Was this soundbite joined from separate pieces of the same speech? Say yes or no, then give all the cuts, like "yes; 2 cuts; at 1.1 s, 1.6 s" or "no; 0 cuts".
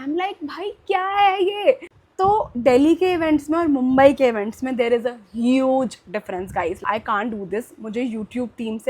yes; 2 cuts; at 1.9 s, 6.8 s